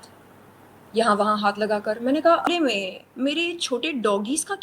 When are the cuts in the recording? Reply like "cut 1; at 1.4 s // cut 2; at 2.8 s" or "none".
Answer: cut 1; at 2.5 s